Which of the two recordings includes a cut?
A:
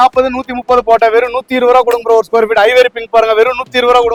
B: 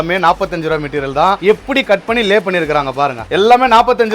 B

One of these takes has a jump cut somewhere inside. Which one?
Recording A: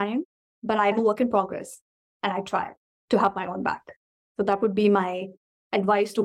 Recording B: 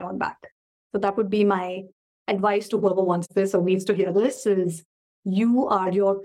A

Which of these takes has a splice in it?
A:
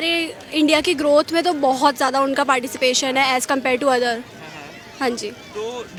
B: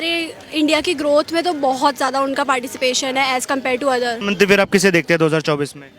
B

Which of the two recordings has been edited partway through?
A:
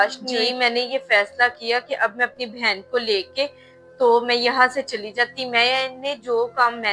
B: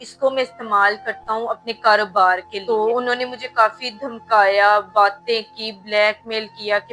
B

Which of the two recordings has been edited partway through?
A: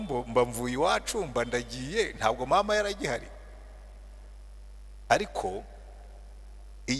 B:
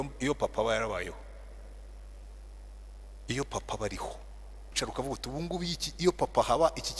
B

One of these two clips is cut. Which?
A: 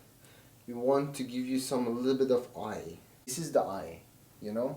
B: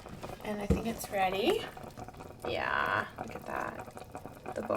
A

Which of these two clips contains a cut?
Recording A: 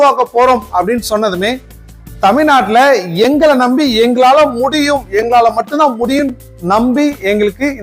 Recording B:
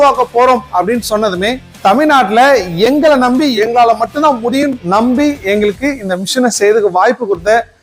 B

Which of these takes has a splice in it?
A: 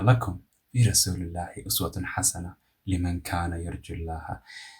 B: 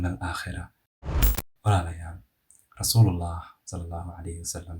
B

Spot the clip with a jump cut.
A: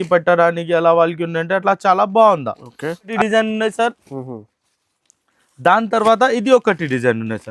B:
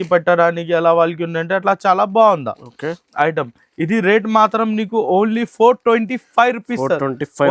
A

